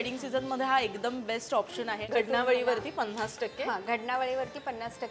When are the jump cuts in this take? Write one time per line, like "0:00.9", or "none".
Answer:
0:02.0